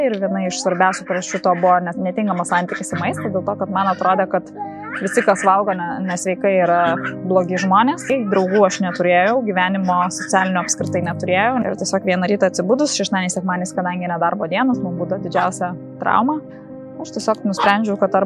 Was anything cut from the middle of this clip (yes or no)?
yes